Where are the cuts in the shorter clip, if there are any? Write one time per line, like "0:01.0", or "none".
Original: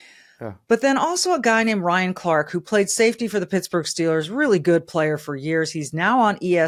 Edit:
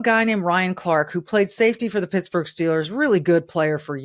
none